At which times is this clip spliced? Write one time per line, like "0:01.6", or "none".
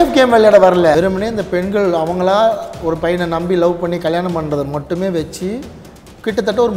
0:00.9